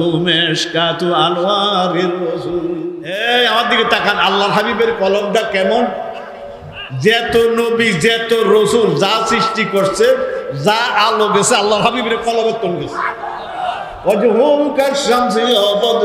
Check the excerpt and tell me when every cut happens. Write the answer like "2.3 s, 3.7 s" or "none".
3.1 s